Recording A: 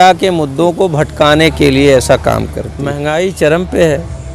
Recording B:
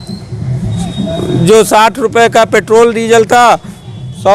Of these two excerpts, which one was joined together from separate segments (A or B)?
A